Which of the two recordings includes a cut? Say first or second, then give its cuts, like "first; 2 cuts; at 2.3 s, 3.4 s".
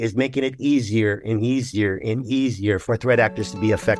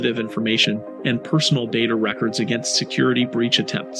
first; 1 cut; at 2.8 s